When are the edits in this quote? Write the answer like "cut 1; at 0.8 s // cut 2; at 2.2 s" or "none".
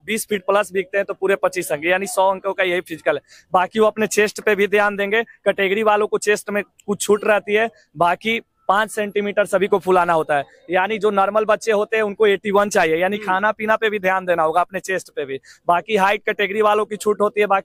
none